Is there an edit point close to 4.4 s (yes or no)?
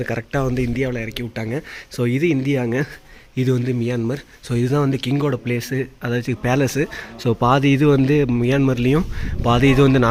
no